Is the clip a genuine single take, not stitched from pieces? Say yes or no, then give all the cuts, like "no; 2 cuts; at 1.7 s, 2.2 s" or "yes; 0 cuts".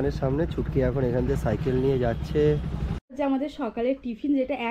no; 1 cut; at 3.4 s